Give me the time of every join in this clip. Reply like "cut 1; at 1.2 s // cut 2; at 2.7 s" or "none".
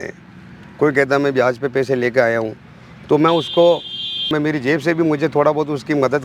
cut 1; at 4.3 s